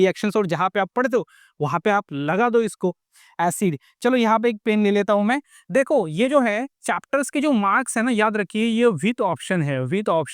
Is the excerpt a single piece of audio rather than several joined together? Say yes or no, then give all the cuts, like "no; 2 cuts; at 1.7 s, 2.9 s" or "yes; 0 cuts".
no; 1 cut; at 3.1 s